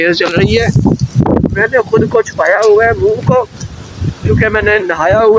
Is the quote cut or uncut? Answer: uncut